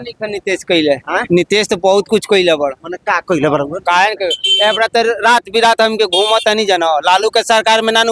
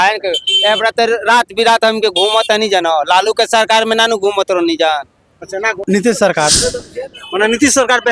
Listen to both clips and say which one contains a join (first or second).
second